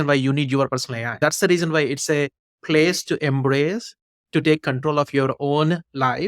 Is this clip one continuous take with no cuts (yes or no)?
no